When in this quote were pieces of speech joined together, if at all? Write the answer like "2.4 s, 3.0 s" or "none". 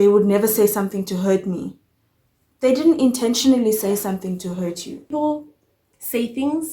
5.1 s